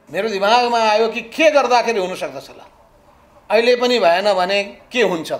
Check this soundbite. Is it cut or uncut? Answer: uncut